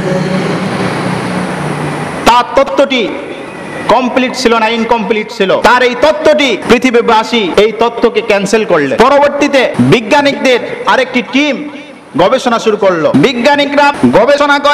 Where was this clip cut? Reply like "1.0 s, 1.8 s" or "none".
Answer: 5.6 s, 6.6 s, 7.5 s, 8.9 s, 9.7 s, 13.1 s, 14.0 s